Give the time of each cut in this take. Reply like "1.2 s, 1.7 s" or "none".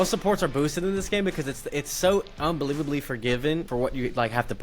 3.7 s